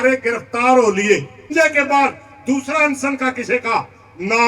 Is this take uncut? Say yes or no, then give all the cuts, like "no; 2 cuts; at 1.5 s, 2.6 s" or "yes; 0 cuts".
no; 1 cut; at 1.5 s